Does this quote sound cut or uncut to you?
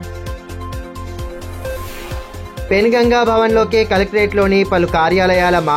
uncut